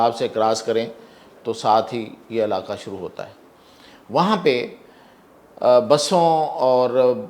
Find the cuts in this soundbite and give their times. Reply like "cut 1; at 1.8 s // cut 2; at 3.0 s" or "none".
none